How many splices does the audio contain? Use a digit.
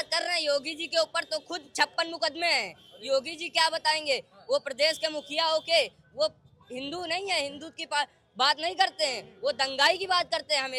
0